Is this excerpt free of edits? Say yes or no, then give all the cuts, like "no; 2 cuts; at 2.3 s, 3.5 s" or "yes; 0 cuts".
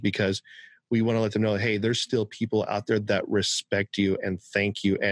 yes; 0 cuts